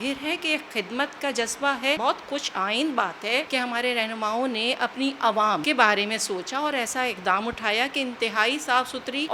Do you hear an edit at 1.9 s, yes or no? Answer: no